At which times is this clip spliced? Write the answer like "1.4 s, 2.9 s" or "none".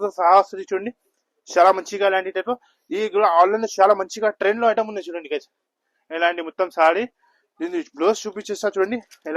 none